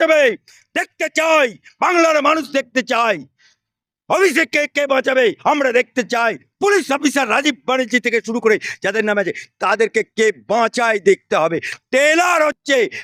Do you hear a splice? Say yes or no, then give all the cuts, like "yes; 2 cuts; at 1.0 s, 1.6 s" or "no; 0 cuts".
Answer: no; 0 cuts